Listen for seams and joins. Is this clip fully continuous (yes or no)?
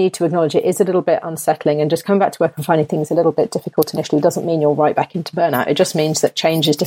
yes